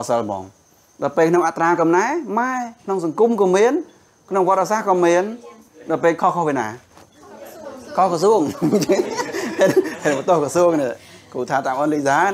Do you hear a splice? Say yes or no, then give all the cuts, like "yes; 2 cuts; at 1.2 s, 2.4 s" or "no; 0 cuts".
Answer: no; 0 cuts